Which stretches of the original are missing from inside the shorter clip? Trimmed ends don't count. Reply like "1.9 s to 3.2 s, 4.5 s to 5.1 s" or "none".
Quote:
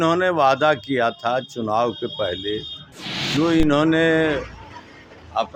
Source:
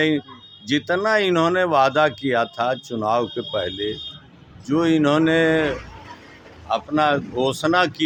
none